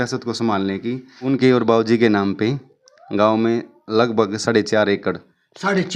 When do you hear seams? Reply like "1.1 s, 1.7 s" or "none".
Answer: 1.3 s